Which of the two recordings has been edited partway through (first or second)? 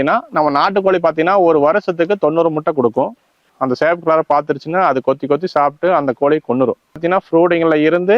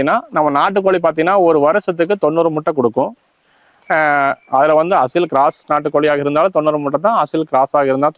first